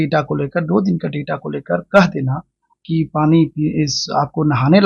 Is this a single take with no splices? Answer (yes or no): yes